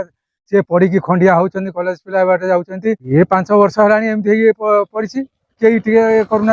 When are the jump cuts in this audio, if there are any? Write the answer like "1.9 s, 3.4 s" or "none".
3.0 s

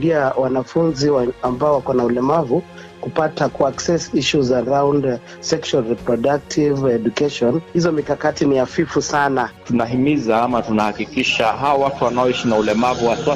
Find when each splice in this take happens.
7.7 s, 9.6 s

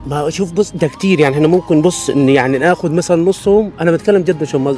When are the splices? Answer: none

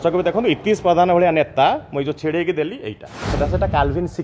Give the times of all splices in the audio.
3.3 s

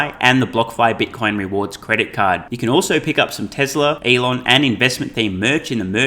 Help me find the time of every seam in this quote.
4.0 s

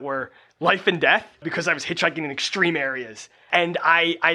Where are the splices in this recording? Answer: 1.5 s, 3.5 s

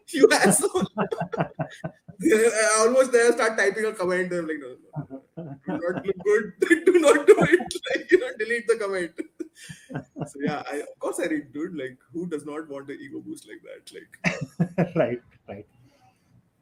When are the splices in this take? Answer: none

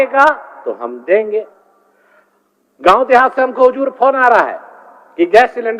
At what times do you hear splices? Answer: 1.6 s

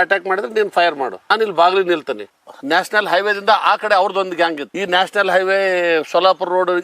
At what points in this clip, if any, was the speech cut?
2.4 s, 4.7 s

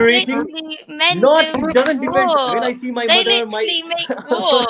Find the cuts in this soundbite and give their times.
none

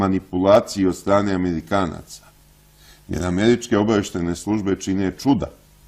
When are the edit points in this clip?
2.8 s

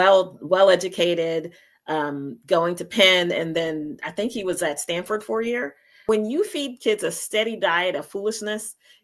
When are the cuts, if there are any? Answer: 5.9 s

